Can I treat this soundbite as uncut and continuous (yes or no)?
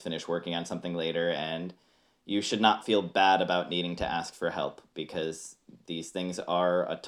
yes